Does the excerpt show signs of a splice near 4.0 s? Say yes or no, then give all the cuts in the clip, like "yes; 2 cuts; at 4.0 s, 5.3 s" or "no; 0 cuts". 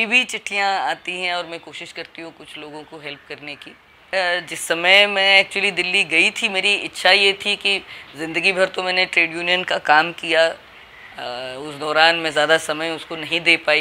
yes; 1 cut; at 4.0 s